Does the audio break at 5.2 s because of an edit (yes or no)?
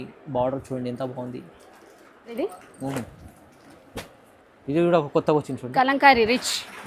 no